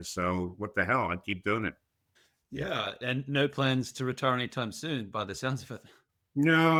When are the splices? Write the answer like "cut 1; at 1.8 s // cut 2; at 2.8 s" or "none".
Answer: none

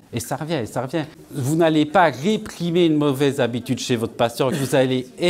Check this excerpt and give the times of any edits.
cut 1; at 1.2 s // cut 2; at 4.6 s

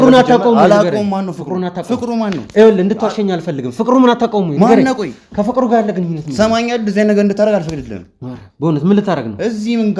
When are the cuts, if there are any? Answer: none

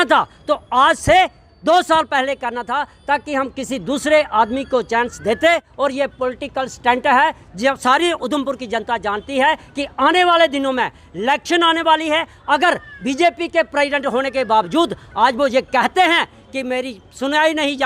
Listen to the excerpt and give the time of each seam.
cut 1; at 5.7 s

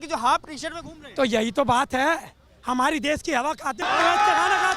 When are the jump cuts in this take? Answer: cut 1; at 3.8 s

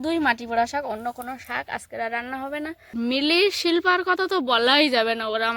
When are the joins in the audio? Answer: cut 1; at 2.9 s

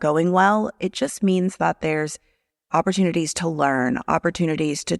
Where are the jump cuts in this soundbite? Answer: none

